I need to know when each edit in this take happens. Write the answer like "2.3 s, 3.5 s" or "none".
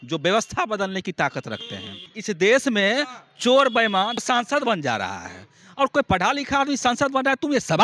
2.1 s, 4.2 s